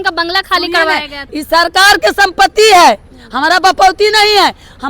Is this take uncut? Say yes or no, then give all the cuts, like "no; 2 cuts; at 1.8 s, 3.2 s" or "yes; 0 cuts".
no; 1 cut; at 1.1 s